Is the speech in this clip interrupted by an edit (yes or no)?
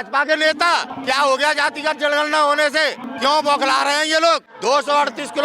yes